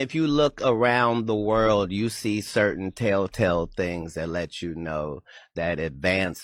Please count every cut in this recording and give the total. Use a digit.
0